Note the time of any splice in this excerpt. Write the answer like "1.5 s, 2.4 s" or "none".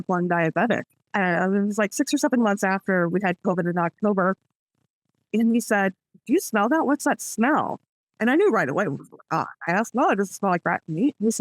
1.0 s